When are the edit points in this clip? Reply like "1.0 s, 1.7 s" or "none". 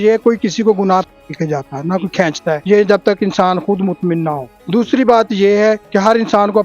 1.2 s, 2.6 s, 4.5 s, 5.8 s